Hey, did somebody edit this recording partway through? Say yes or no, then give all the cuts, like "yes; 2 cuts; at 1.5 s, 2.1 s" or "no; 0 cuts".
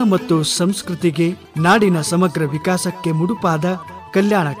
yes; 1 cut; at 1.5 s